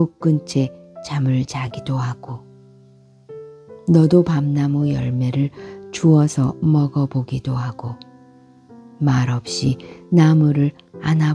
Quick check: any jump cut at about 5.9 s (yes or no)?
no